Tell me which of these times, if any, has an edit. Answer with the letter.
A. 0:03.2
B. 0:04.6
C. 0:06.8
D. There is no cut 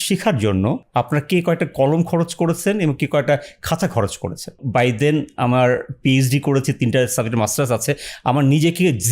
B